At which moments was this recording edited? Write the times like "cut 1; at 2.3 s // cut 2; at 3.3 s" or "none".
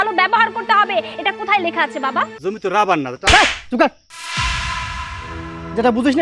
cut 1; at 2.4 s